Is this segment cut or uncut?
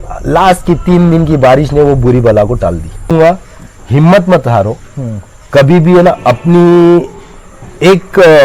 cut